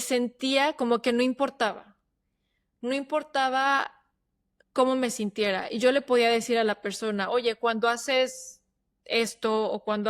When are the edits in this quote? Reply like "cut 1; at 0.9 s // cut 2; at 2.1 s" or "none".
none

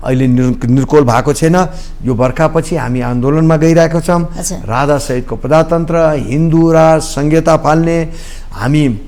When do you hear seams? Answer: none

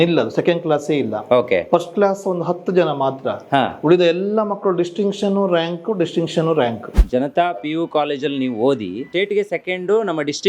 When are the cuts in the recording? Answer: cut 1; at 7.0 s // cut 2; at 9.1 s

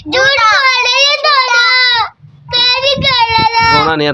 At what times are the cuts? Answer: cut 1; at 1.5 s

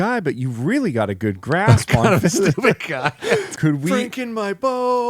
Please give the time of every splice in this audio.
cut 1; at 3.5 s

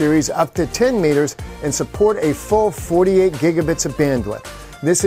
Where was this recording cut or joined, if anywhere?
none

